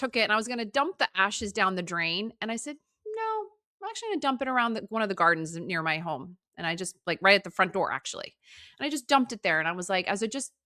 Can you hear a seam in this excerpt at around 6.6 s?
no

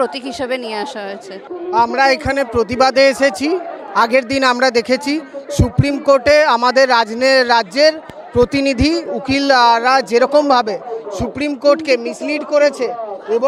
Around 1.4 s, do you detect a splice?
no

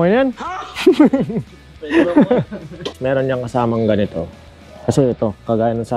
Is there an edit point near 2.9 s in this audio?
yes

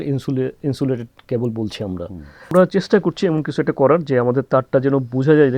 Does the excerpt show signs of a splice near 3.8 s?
no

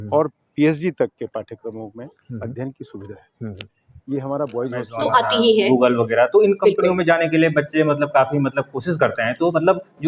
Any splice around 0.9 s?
no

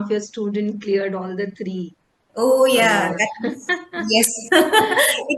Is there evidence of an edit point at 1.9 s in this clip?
no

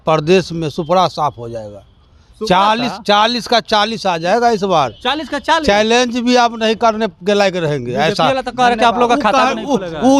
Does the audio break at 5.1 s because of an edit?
no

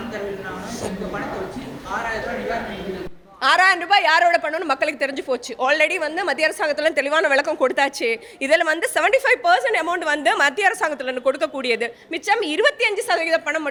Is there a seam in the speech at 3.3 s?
no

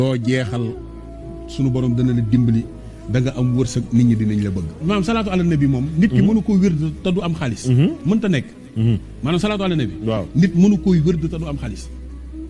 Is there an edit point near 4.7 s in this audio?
yes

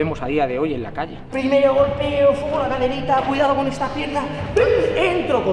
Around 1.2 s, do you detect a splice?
yes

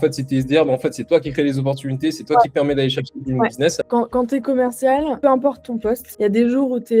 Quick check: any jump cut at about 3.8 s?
yes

